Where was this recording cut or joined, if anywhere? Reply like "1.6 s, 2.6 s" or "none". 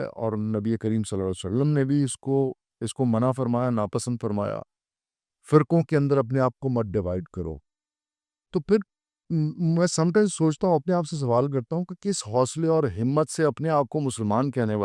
none